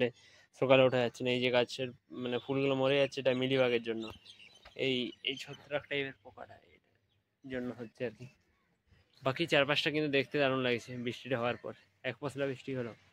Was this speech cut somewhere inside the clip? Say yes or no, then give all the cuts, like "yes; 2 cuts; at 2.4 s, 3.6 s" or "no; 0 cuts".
no; 0 cuts